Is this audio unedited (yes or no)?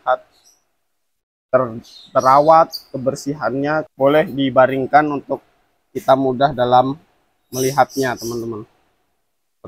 no